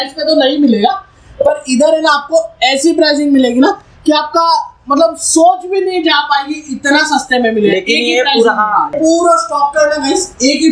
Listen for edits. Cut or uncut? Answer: uncut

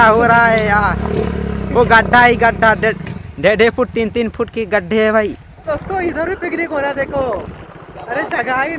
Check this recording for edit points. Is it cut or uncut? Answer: cut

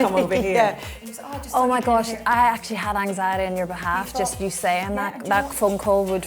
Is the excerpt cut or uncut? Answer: cut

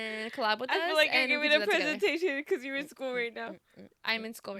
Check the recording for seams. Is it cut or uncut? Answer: uncut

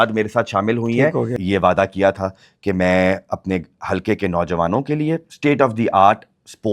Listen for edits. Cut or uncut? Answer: cut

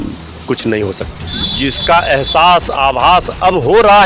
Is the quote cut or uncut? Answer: cut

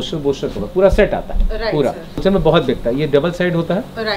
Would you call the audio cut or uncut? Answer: cut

